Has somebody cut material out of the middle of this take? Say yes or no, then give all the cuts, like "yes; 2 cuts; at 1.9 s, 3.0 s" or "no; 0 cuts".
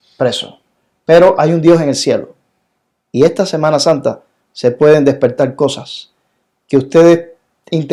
no; 0 cuts